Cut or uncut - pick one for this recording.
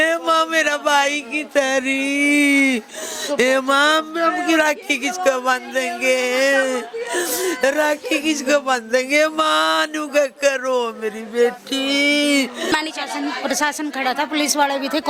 cut